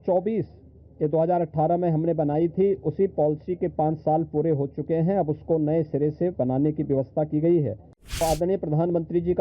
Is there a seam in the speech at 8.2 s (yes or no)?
yes